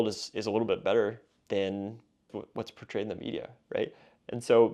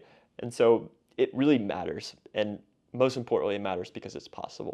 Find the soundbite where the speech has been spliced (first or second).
first